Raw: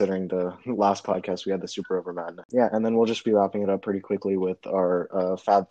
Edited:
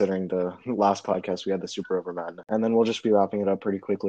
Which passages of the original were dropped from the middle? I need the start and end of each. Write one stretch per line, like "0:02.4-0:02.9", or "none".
0:02.5-0:02.7

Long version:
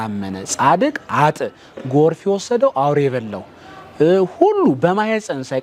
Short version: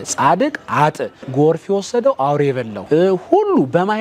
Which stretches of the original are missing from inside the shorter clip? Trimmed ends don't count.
0:01.5-0:01.7
0:03.3-0:03.8

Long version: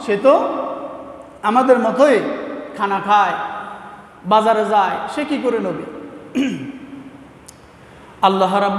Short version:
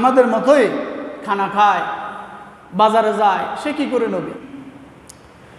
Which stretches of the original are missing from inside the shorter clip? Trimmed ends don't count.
0:06.0-0:06.8

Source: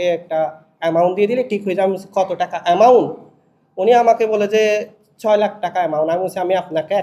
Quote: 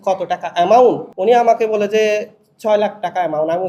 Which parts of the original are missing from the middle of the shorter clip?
0:03.2-0:03.7

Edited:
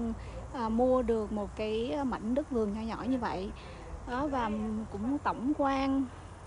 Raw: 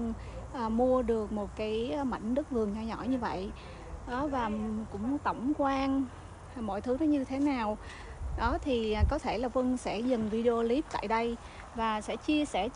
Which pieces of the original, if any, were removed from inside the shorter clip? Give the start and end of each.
none

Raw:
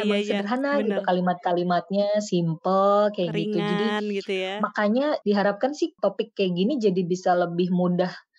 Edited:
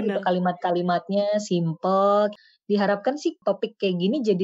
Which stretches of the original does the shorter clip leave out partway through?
0:03.4-0:05.2

